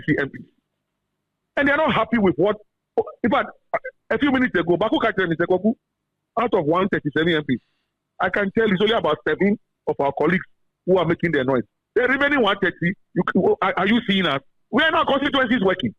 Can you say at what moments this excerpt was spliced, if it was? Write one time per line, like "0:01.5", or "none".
none